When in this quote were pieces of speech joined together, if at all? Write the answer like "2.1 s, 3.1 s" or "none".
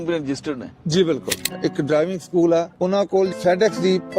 1.6 s, 3.2 s